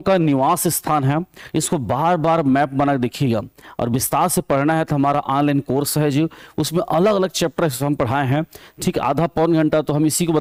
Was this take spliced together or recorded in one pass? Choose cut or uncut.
uncut